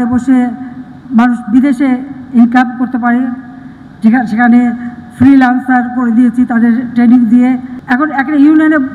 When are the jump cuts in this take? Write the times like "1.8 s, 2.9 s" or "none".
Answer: none